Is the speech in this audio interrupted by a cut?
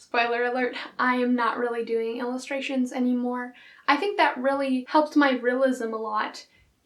no; 0 cuts

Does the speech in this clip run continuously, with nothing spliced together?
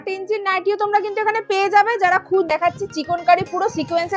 no; 1 cut; at 2.5 s

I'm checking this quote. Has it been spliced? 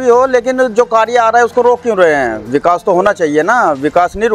no; 0 cuts

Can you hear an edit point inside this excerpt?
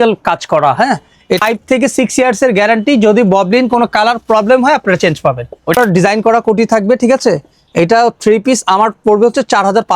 yes; 2 cuts; at 1.4 s, 5.7 s

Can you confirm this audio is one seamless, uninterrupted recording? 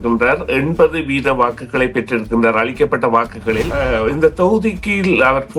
no; 1 cut; at 3.8 s

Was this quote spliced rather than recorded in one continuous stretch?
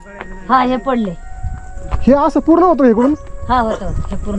no; 0 cuts

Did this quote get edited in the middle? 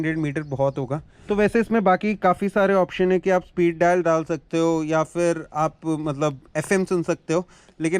no; 0 cuts

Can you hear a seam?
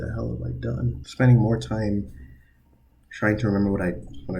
yes; 1 cut; at 1.0 s

